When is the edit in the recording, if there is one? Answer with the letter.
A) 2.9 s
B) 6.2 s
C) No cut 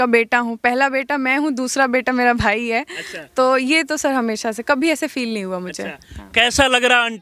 C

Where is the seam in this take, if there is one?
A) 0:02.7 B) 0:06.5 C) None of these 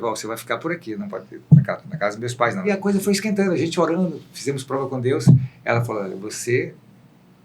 A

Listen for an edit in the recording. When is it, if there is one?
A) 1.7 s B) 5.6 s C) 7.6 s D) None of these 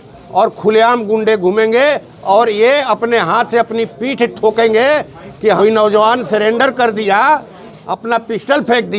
B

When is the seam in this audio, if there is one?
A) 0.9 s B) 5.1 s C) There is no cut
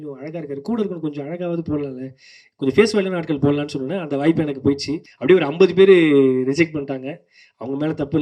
B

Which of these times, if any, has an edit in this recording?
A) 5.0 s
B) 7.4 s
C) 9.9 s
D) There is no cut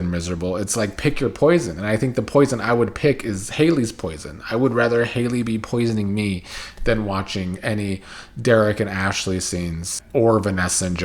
C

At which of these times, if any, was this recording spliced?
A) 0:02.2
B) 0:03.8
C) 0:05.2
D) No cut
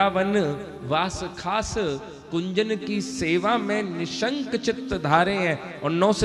D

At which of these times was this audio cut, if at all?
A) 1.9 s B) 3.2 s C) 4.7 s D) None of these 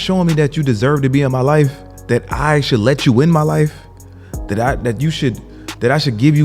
A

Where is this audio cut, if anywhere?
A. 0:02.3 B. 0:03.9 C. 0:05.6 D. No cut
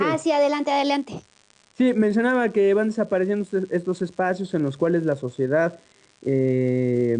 C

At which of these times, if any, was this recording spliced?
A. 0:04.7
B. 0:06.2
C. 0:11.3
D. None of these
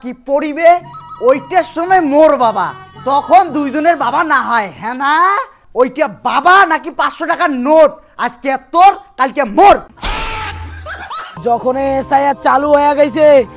C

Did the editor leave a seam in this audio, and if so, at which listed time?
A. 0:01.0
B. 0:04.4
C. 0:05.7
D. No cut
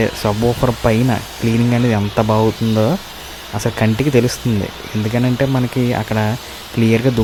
D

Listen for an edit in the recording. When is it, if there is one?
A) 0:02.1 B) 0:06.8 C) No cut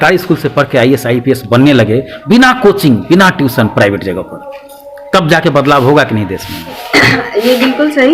B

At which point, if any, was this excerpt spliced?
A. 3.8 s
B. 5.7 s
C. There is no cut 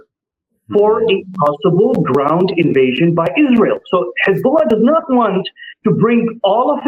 C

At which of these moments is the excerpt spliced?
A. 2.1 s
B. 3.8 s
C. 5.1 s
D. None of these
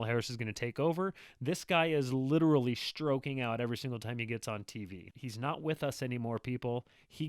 C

